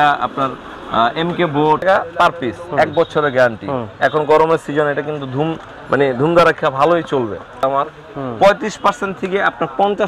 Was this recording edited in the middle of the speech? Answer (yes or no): yes